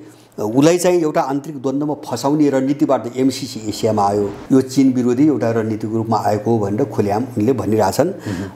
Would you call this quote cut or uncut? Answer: cut